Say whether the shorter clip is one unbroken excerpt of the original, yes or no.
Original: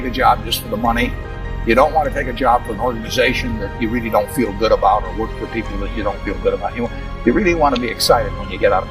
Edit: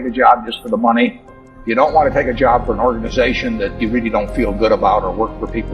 yes